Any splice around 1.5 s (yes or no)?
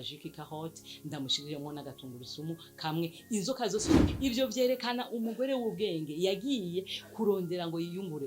no